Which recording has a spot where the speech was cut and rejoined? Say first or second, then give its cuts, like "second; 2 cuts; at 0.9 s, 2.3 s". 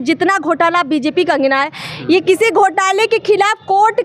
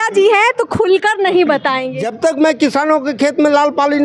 second; 1 cut; at 1.8 s